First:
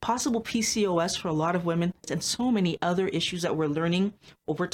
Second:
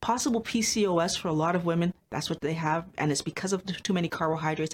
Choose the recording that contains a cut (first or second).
first